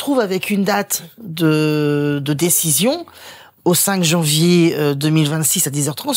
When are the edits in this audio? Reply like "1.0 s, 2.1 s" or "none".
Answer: none